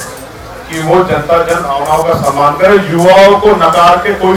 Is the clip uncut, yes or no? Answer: yes